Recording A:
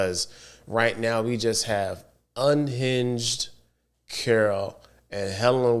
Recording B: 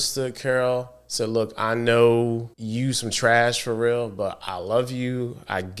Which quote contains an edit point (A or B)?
B